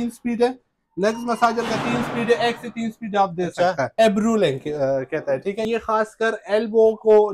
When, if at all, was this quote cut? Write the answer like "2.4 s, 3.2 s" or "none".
3.9 s, 5.6 s